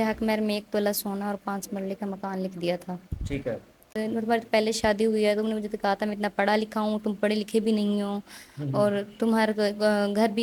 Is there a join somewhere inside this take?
yes; 1 cut; at 4.0 s

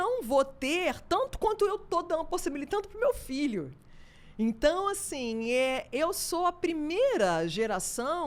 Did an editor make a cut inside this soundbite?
no; 0 cuts

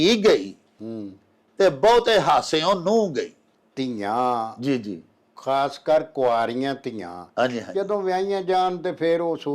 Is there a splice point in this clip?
yes; 1 cut; at 3.4 s

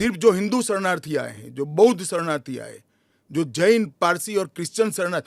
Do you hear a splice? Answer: no; 0 cuts

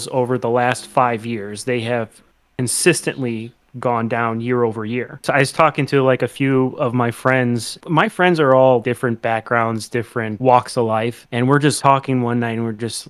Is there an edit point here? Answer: yes; 5 cuts; at 5.2 s, 7.8 s, 8.8 s, 10.3 s, 11.7 s

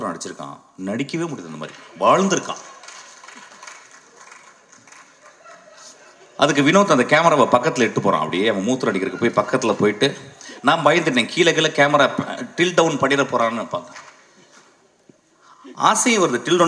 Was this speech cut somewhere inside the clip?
no; 0 cuts

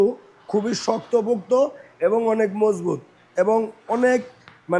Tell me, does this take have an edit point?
no; 0 cuts

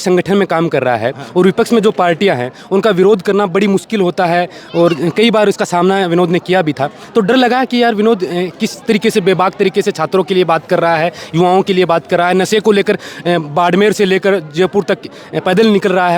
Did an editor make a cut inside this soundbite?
no; 0 cuts

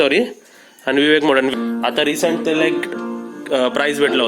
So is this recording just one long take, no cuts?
no; 1 cut; at 1.5 s

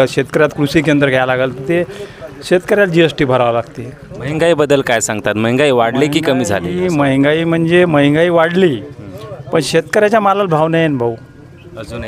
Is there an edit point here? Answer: no; 0 cuts

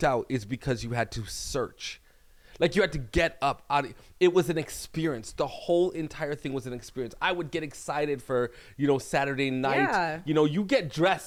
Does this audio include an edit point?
no; 0 cuts

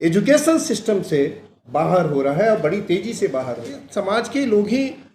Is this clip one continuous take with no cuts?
no; 1 cut; at 3.8 s

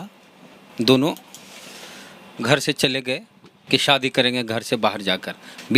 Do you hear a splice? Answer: no; 0 cuts

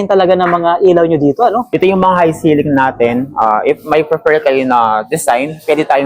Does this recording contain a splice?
no; 0 cuts

